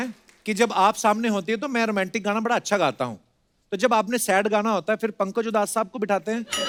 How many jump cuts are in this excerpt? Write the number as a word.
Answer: zero